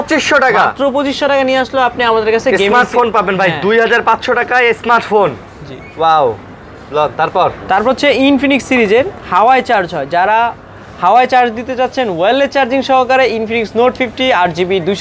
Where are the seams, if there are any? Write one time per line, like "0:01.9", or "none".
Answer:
none